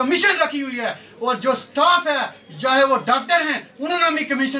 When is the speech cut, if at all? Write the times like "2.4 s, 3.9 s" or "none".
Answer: none